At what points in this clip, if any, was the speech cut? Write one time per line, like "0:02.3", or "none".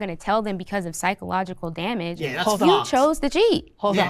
none